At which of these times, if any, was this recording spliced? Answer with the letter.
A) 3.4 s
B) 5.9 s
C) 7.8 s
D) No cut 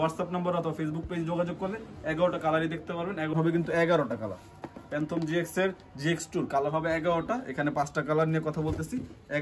A